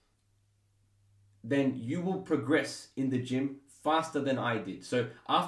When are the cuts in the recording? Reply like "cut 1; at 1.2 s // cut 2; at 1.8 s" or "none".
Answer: none